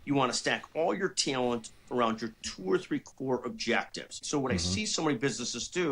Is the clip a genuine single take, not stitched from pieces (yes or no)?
no